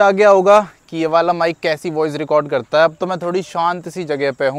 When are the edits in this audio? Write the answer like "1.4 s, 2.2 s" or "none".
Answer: none